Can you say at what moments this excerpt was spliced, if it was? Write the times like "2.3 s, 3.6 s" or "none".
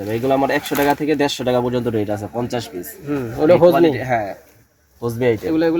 none